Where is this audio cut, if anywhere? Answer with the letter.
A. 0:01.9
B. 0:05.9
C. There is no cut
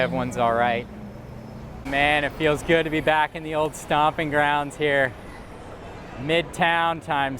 A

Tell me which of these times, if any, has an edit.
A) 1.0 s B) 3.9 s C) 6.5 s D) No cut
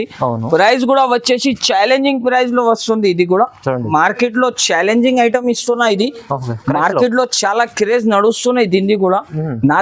B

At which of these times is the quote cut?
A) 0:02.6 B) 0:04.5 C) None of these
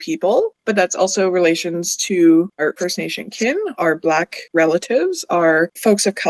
A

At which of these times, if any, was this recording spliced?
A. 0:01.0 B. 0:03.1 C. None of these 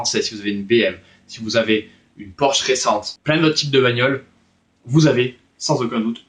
B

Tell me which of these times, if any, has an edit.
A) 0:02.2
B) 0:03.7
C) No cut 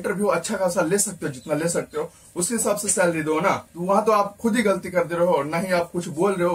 B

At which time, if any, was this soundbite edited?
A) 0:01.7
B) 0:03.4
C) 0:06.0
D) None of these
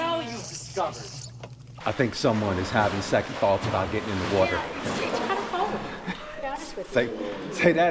A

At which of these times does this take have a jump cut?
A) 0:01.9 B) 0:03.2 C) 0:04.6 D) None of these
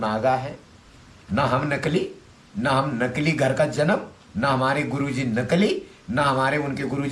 D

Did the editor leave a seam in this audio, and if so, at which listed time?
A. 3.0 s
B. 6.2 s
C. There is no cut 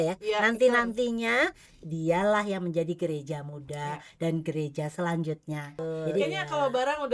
B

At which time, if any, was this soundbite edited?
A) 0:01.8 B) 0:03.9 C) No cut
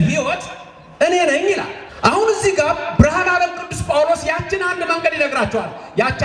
A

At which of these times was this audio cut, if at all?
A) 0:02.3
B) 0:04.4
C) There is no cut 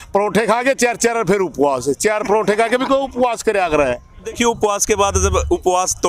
B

